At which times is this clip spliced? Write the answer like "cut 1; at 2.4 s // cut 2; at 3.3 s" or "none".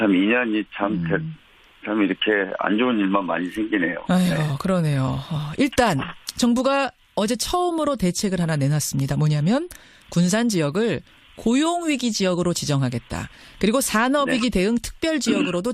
cut 1; at 4.4 s

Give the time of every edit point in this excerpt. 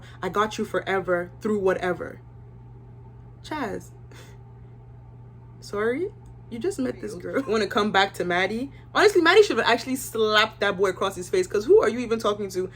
cut 1; at 7.3 s

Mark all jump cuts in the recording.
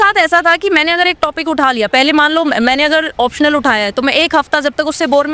none

